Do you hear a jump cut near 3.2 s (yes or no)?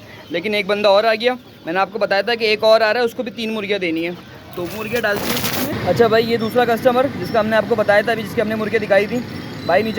no